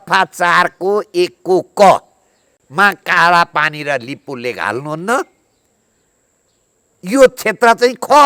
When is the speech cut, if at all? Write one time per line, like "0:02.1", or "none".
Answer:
none